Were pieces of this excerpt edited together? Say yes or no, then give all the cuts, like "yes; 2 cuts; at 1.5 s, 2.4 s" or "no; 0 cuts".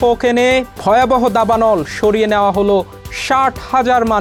no; 0 cuts